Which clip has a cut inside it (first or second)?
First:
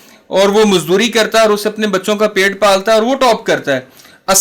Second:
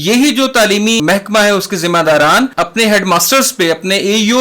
second